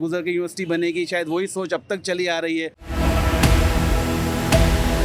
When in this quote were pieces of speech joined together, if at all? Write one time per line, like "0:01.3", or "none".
0:02.8

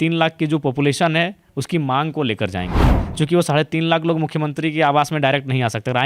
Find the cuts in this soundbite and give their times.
none

